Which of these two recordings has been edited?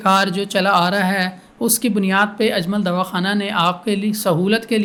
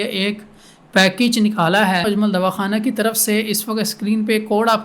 second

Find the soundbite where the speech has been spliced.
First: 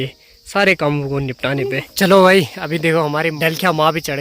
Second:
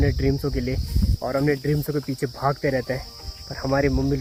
first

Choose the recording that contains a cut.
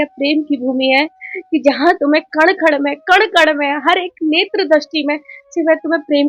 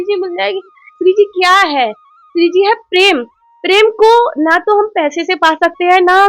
second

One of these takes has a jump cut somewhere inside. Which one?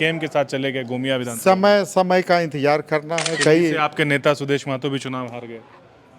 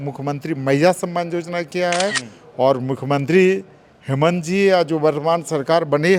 first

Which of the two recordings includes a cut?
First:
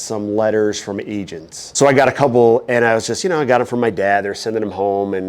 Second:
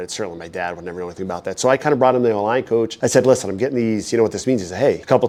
first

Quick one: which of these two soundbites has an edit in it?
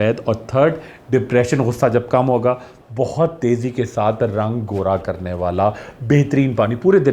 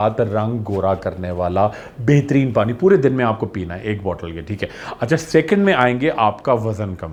first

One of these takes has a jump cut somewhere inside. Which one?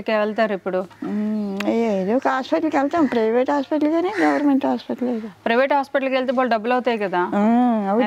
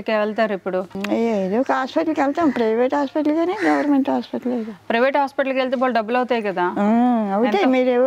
second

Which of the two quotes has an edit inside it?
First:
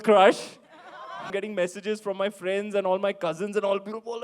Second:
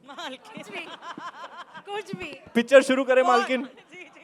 first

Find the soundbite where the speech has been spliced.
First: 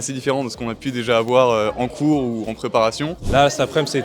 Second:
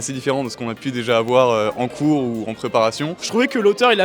second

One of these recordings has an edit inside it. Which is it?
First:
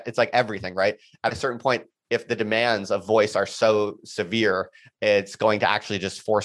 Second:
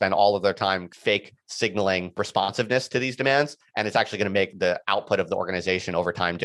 second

